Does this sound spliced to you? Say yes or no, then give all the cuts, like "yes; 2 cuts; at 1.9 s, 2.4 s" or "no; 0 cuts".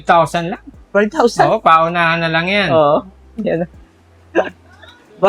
no; 0 cuts